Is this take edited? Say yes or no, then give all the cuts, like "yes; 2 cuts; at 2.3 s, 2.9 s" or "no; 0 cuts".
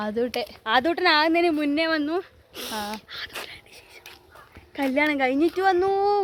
no; 0 cuts